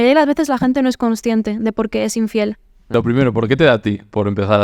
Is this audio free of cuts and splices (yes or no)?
no